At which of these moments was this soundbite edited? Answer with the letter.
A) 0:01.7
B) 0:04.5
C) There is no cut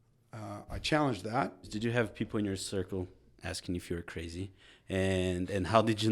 A